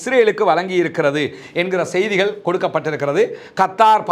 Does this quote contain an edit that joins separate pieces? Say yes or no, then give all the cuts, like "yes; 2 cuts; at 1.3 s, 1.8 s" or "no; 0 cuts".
no; 0 cuts